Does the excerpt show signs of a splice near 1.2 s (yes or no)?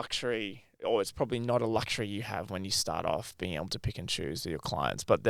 no